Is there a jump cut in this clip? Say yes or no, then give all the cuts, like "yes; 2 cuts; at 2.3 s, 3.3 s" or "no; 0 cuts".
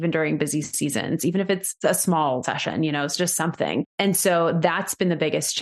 yes; 3 cuts; at 1.7 s, 2.5 s, 3.9 s